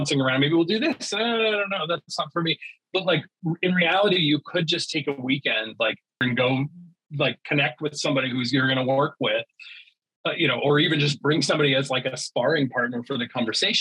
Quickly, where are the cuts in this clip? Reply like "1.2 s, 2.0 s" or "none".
6.2 s